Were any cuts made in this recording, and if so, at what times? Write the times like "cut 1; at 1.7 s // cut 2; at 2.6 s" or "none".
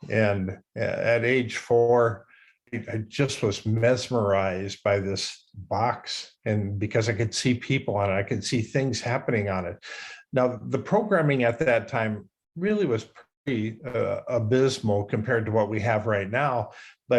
cut 1; at 2.7 s // cut 2; at 5.4 s